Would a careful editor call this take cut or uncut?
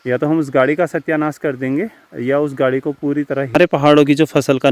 cut